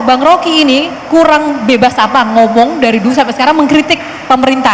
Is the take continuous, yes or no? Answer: yes